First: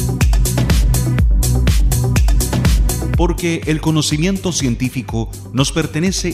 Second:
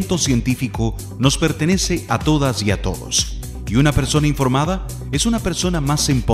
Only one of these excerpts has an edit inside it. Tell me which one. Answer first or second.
first